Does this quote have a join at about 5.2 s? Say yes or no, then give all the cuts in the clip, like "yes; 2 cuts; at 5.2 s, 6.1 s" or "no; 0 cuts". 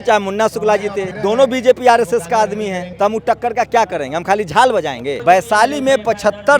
yes; 3 cuts; at 1.1 s, 2.8 s, 5.2 s